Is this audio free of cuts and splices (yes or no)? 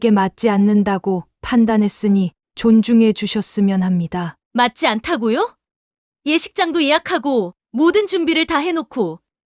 yes